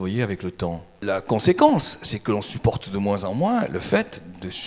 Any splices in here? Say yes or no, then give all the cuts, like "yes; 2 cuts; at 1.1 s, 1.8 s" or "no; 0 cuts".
yes; 1 cut; at 1.0 s